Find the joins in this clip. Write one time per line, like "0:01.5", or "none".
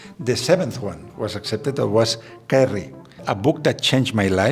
0:03.3

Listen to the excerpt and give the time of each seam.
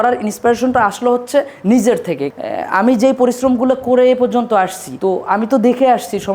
0:02.3
0:04.8

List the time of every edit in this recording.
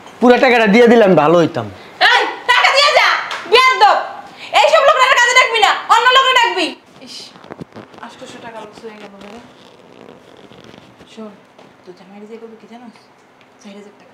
none

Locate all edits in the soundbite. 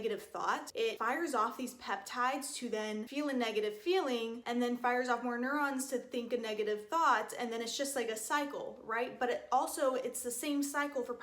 0:00.9
0:03.1

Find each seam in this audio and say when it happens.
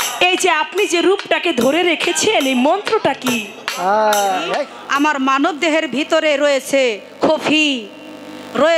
0:04.8

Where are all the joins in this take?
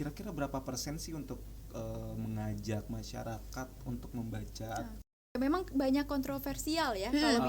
0:05.4

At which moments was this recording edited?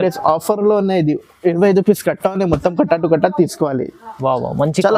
none

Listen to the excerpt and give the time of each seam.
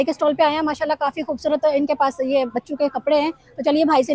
none

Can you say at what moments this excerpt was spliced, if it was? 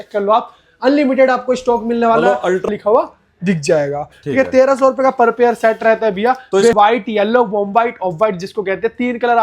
0:02.7
0:06.7

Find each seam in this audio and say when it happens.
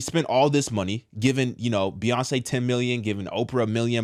none

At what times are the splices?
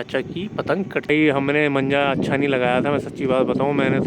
0:01.1

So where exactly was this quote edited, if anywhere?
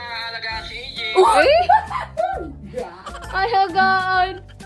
none

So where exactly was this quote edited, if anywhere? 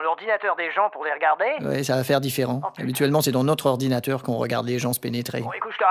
0:03.9

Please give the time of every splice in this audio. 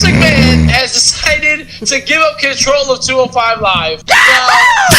0:04.0

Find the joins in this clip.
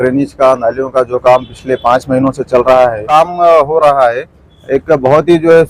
0:03.1

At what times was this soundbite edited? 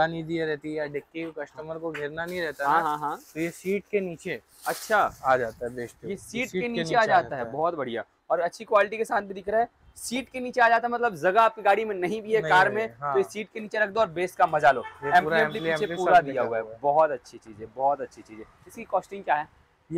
none

